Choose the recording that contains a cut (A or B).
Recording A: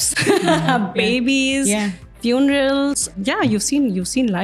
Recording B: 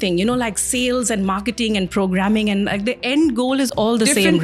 A